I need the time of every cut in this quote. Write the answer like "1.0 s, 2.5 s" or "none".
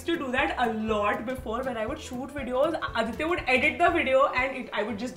none